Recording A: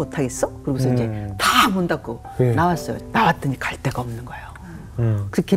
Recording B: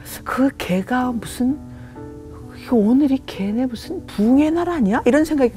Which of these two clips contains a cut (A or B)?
A